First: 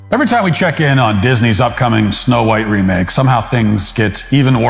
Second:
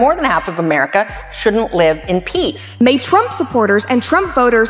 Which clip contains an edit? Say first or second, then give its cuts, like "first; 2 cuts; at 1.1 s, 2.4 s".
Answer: second; 1 cut; at 2.7 s